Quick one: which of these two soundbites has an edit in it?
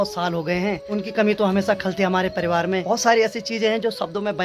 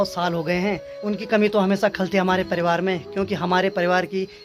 first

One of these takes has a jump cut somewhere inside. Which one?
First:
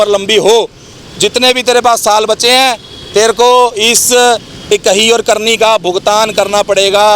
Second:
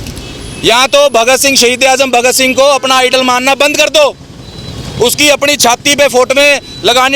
first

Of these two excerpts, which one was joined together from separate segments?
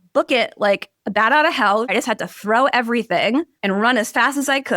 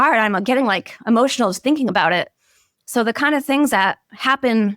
first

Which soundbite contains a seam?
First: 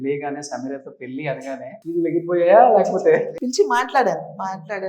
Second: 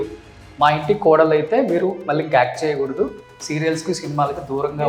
first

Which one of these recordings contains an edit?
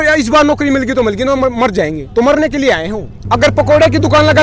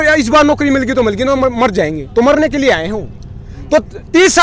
first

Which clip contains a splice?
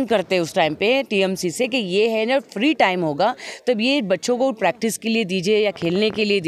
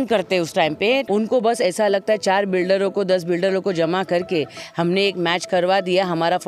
second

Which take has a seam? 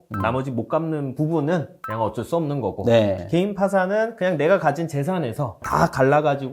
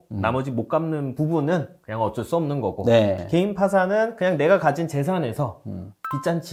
first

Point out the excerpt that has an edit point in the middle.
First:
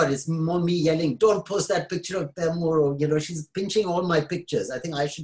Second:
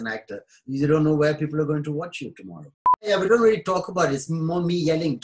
second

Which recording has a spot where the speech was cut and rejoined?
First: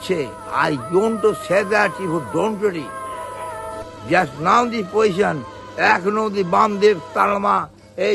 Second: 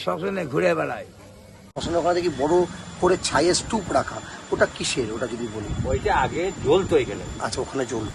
second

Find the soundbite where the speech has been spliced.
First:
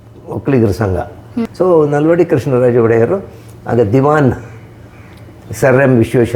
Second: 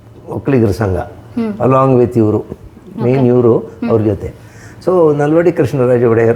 first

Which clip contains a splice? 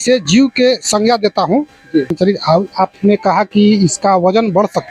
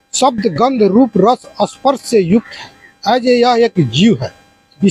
first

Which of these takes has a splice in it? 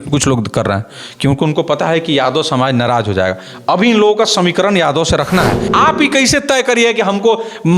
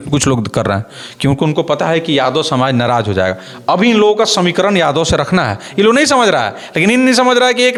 first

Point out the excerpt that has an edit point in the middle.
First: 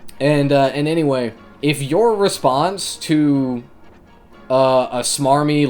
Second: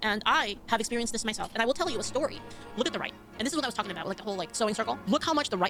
first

